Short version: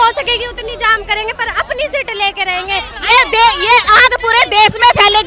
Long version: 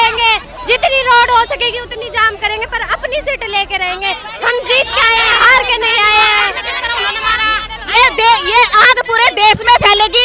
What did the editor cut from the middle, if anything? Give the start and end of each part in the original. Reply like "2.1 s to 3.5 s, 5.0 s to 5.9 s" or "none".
4.3 s to 7.8 s